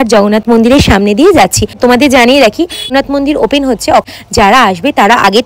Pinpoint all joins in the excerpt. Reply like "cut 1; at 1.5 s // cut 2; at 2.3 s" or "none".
cut 1; at 1.8 s // cut 2; at 2.9 s // cut 3; at 4.1 s